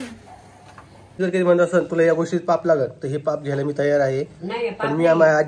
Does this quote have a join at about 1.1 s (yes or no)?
yes